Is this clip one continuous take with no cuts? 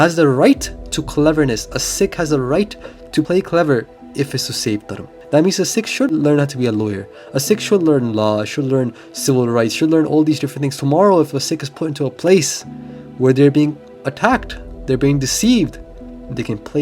no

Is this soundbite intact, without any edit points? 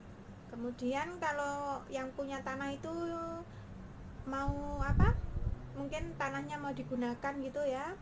yes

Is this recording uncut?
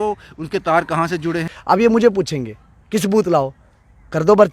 no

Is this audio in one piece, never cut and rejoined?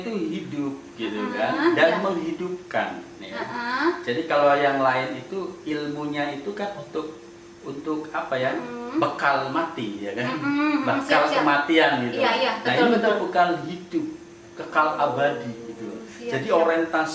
yes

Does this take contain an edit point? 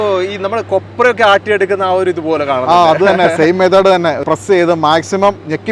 yes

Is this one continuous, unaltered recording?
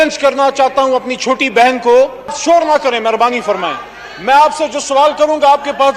no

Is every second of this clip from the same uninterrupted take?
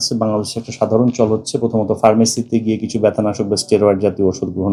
yes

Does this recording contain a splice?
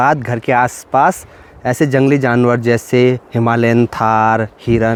no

